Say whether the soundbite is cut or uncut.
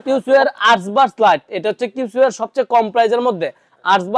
uncut